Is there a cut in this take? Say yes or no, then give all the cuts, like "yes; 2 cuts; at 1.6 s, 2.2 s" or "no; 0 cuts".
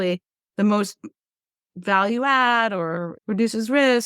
yes; 1 cut; at 3.1 s